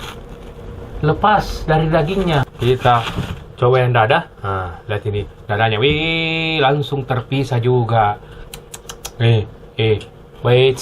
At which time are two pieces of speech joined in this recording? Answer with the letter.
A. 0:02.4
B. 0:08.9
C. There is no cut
A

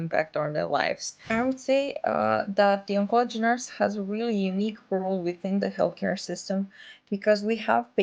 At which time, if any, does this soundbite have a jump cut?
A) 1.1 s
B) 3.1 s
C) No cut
A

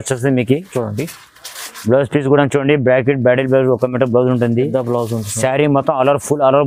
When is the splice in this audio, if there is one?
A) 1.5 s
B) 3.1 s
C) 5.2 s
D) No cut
D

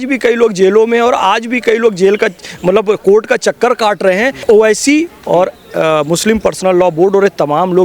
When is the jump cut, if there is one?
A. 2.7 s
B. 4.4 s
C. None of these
B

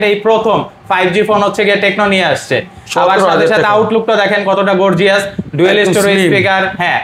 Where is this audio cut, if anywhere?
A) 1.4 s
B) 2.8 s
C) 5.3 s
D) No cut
D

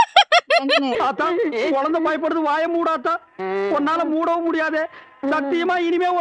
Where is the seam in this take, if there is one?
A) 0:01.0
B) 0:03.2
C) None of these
A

